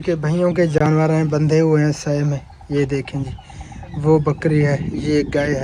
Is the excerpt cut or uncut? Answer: uncut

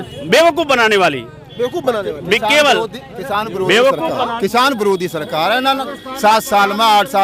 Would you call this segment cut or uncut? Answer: uncut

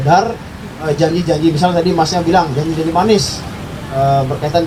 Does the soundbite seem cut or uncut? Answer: uncut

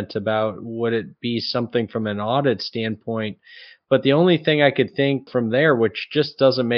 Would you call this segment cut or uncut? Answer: cut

